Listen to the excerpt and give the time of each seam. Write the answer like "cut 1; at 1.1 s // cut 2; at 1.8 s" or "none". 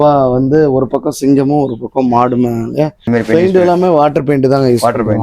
cut 1; at 3.0 s